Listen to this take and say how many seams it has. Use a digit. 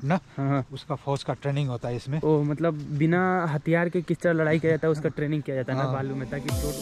0